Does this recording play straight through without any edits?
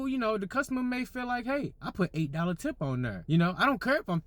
no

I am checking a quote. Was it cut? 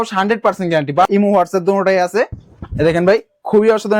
yes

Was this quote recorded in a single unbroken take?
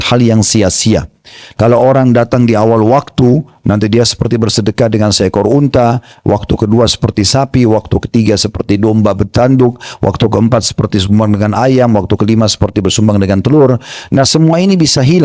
no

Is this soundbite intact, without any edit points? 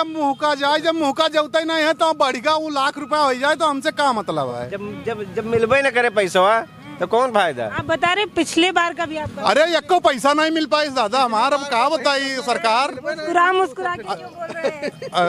yes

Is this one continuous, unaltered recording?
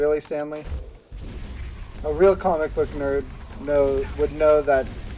no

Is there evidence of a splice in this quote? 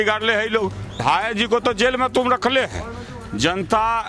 yes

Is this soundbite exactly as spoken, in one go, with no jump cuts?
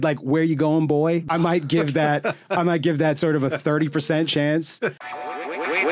no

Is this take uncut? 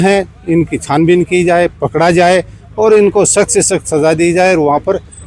yes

